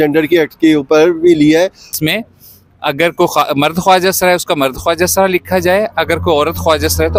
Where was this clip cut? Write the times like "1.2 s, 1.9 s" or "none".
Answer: 1.9 s